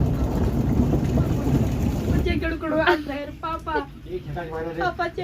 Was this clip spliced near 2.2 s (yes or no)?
yes